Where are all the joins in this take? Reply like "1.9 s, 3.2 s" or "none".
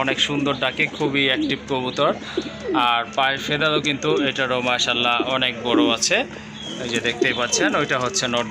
none